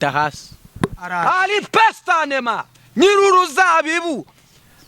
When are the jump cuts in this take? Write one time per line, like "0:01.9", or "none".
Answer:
0:01.0